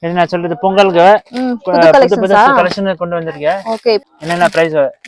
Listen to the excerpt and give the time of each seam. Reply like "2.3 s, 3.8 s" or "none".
4.0 s